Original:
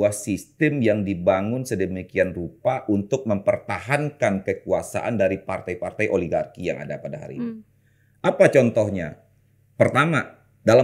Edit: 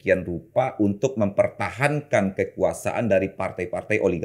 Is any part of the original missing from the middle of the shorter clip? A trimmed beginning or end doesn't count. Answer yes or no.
no